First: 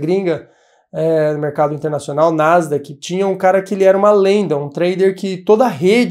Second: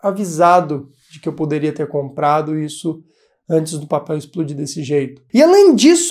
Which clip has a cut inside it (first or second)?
second